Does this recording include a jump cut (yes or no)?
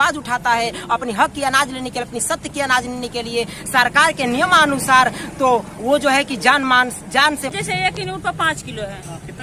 yes